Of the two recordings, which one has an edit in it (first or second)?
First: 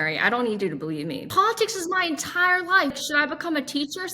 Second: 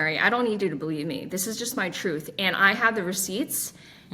first